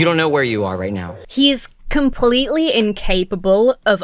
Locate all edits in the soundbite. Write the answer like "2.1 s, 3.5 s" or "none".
1.2 s